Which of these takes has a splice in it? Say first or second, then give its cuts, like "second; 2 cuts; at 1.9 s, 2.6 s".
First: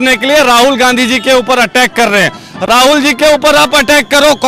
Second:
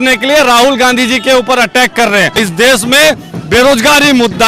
second; 1 cut; at 2.4 s